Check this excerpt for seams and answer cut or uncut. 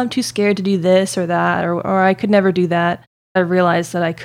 cut